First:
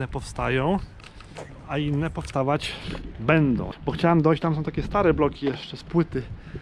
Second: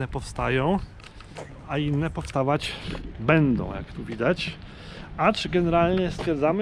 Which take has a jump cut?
first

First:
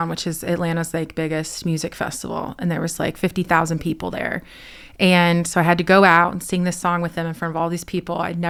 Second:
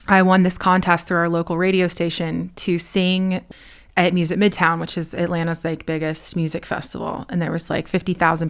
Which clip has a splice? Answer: second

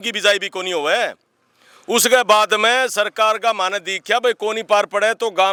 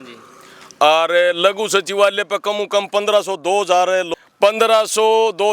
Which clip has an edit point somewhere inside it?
second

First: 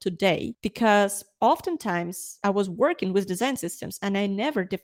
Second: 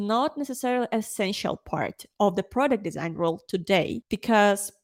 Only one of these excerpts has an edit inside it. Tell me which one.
first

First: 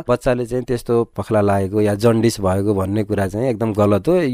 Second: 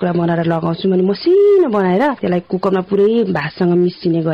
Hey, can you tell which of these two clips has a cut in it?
first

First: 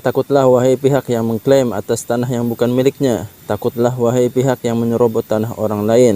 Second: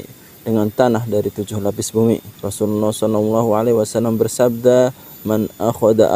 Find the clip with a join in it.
second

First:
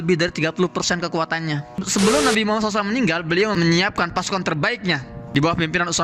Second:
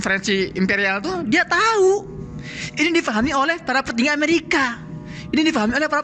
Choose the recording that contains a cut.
first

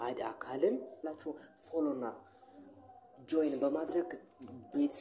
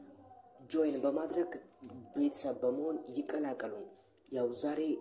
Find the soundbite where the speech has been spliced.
first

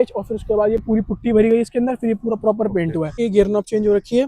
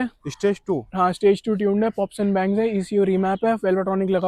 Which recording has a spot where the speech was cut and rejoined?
first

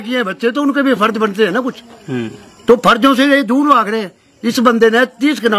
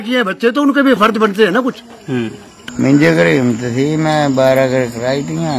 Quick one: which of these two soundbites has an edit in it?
second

